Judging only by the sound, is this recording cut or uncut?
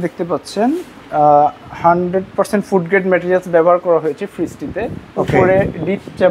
uncut